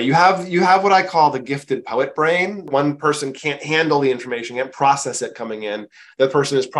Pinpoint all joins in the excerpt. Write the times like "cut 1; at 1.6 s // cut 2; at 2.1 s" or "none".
cut 1; at 2.6 s